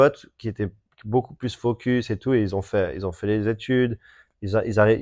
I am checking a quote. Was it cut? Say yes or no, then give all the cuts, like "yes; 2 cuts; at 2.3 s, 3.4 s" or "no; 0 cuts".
no; 0 cuts